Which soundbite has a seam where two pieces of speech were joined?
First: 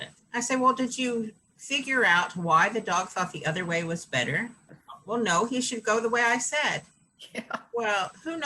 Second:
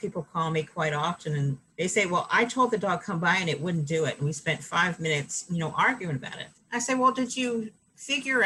first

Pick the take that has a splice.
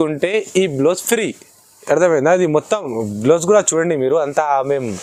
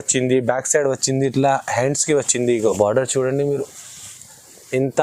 second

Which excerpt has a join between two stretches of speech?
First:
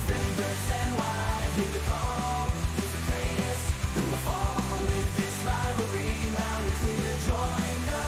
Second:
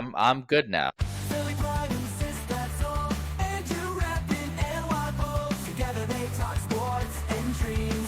second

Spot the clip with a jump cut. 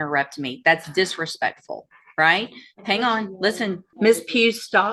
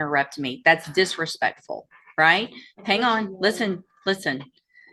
first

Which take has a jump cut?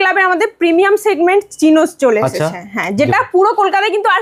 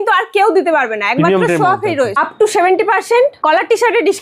second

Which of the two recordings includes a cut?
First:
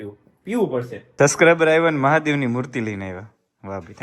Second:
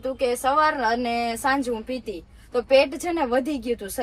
first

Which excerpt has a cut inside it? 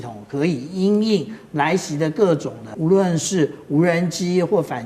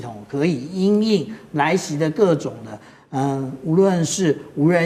first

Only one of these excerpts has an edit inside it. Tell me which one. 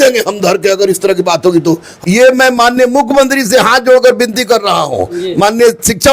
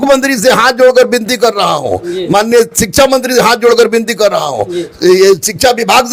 first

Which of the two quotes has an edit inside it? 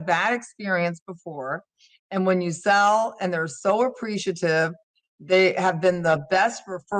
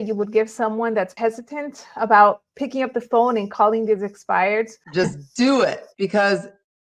second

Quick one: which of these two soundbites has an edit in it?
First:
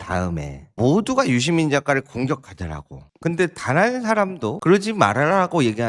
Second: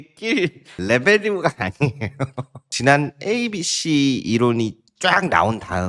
second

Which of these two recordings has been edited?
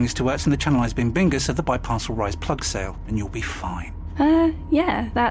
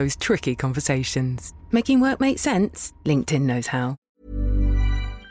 second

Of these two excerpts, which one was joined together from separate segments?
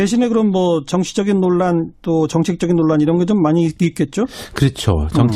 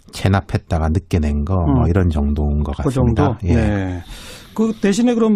first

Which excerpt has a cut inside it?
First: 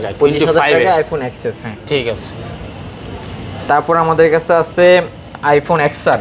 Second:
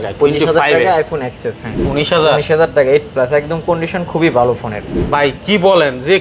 second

